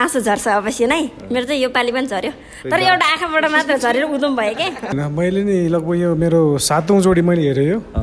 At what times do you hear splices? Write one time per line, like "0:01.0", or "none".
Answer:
0:04.9

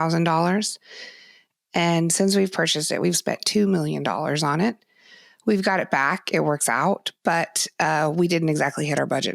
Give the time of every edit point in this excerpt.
none

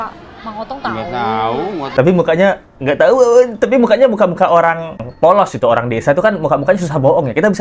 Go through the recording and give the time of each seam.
0:01.9

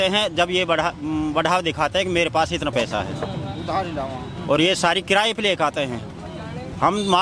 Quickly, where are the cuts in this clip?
none

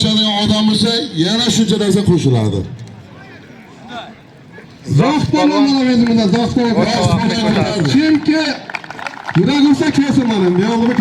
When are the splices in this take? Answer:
none

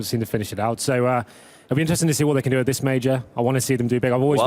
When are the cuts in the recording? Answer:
0:01.9

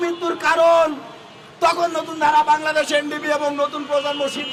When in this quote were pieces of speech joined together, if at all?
none

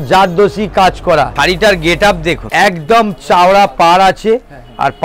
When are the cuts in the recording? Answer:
0:01.3
0:02.4

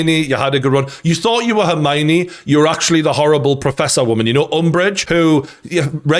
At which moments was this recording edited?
none

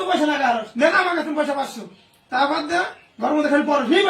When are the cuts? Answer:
0:02.3

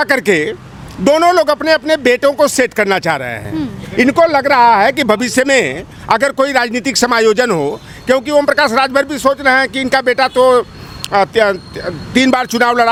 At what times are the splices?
none

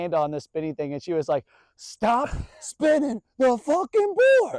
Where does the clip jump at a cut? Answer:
none

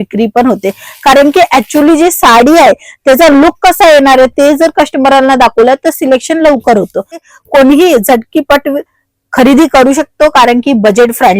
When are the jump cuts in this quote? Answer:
0:07.2

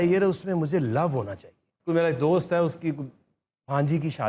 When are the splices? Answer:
0:01.7

